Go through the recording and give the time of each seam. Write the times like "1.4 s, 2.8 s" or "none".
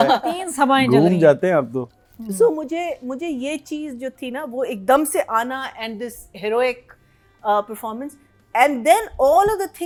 none